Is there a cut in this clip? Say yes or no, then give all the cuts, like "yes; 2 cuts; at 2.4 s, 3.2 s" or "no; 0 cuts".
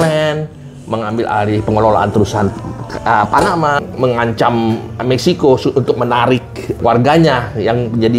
yes; 2 cuts; at 3.8 s, 6.8 s